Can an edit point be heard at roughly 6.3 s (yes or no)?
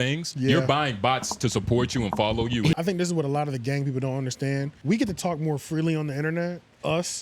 no